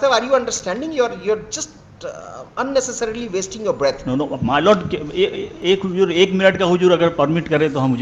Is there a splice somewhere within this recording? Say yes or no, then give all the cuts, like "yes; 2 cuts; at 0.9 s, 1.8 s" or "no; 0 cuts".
no; 0 cuts